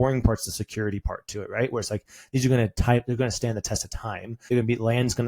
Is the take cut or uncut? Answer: cut